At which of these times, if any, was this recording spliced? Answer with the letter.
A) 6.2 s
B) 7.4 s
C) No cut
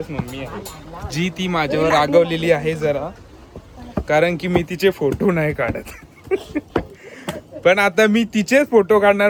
C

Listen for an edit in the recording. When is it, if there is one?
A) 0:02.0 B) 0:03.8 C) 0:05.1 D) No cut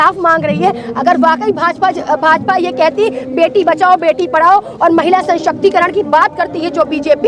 D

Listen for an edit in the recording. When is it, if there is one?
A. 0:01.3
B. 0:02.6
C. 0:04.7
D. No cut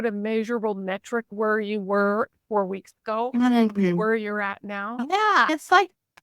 A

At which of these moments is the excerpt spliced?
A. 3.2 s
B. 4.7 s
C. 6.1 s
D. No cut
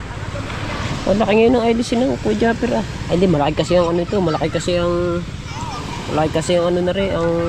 D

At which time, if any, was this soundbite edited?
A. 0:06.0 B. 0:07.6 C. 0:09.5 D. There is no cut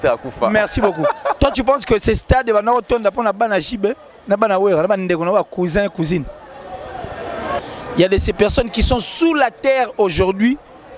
B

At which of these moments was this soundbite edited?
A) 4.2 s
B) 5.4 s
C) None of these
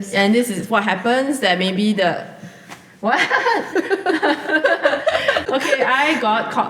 B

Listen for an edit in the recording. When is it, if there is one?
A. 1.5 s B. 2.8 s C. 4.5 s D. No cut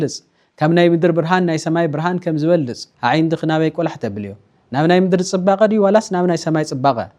B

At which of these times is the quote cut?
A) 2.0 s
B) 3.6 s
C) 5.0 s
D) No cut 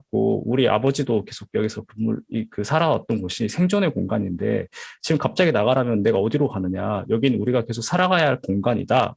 D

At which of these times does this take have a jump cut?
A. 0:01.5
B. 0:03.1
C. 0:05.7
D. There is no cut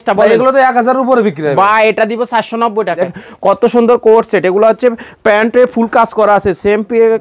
B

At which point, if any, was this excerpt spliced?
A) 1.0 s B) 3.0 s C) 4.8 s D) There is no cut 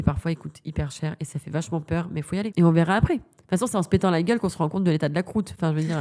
D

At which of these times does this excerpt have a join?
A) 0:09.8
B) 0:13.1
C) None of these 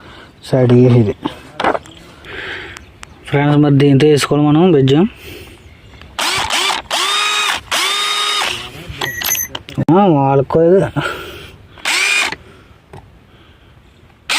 A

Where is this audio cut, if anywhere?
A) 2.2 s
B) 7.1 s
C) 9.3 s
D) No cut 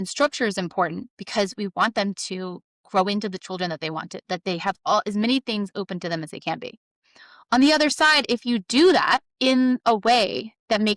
C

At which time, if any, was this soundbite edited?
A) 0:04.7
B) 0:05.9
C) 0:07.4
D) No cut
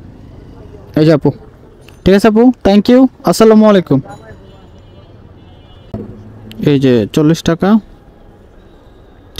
B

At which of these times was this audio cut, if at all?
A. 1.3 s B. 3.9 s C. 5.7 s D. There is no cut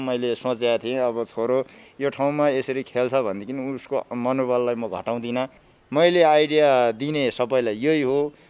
C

